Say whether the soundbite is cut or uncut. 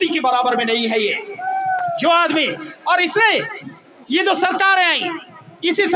uncut